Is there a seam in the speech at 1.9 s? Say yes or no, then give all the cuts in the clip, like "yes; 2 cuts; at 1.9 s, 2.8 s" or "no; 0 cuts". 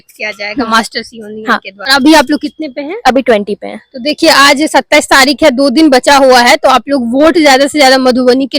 yes; 1 cut; at 1.9 s